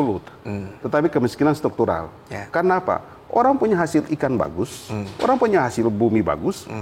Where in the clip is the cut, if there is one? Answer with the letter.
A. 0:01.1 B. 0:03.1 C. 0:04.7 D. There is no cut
D